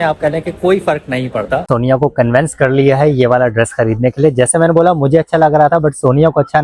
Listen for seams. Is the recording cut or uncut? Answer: cut